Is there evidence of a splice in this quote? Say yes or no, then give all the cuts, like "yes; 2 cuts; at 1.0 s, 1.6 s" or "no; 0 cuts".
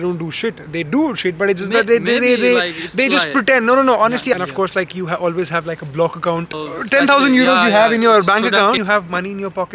yes; 3 cuts; at 4.3 s, 6.5 s, 8.8 s